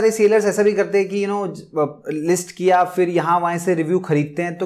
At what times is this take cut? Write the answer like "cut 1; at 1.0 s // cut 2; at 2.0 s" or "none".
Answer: none

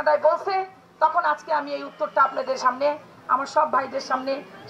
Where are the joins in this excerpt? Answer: none

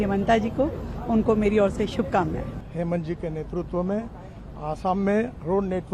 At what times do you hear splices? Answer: cut 1; at 2.5 s

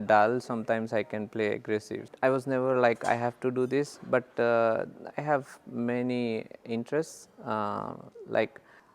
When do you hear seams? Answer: cut 1; at 2.0 s

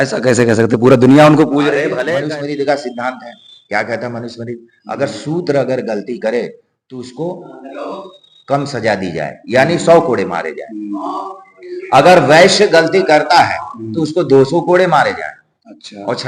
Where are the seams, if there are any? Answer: cut 1; at 2.0 s

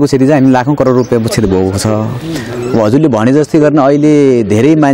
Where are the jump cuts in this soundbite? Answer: none

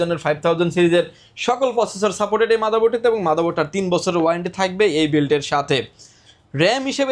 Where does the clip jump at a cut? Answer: none

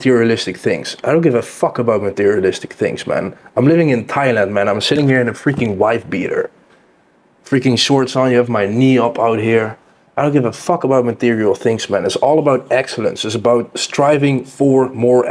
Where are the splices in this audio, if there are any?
none

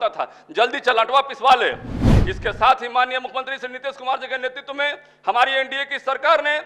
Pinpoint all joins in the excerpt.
cut 1; at 1.9 s

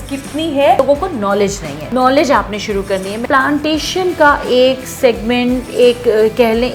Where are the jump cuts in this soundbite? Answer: cut 1; at 0.8 s // cut 2; at 1.7 s // cut 3; at 3.2 s

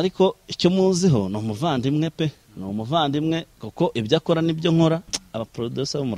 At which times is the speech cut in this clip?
cut 1; at 5.2 s

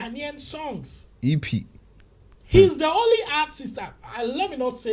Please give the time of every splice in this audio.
none

